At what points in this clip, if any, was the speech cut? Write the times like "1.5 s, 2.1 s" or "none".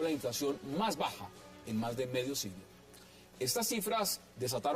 3.6 s